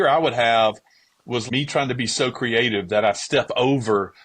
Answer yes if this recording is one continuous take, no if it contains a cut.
no